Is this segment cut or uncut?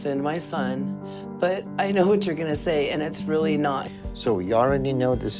uncut